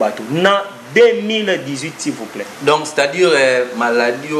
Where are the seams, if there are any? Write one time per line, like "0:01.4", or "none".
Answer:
none

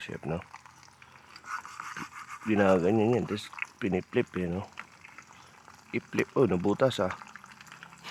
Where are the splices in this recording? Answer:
none

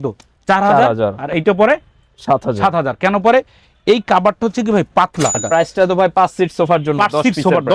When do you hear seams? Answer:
0:05.4

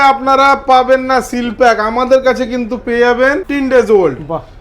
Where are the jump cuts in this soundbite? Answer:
0:03.5

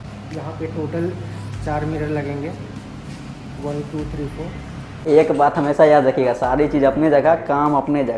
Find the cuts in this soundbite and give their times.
0:04.9

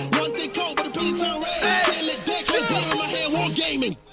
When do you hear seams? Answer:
0:02.4

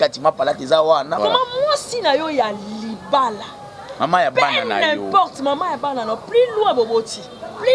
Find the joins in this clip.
0:01.1

